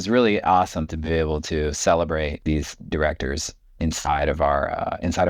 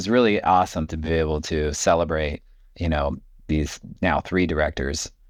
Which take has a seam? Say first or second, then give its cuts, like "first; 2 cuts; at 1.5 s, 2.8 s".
first; 1 cut; at 2.9 s